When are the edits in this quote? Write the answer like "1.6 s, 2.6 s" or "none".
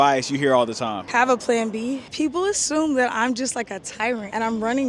2.0 s